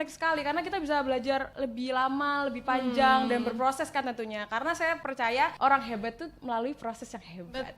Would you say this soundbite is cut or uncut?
cut